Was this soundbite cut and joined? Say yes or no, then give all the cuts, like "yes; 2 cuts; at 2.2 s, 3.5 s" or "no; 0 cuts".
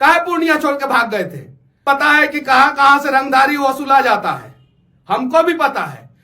yes; 1 cut; at 1.8 s